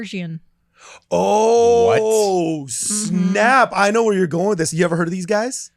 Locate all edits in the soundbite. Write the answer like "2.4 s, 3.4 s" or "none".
none